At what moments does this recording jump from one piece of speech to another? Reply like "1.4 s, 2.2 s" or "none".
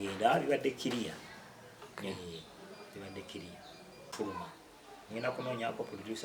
4.1 s